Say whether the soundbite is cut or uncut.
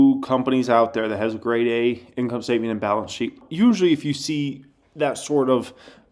cut